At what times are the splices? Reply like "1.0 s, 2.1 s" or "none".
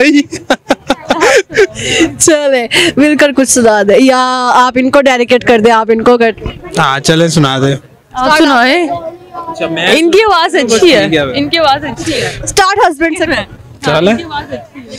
none